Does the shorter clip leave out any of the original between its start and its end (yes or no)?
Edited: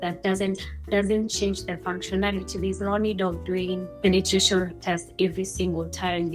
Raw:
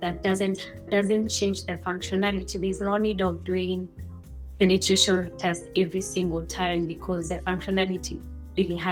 yes